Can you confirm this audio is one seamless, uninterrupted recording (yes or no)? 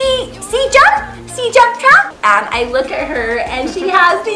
no